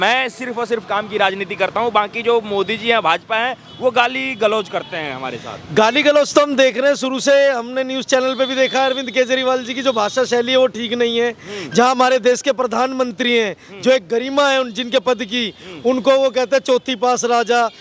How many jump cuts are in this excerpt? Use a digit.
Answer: 0